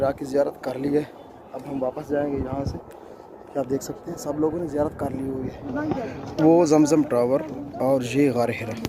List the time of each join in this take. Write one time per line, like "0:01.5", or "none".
0:05.6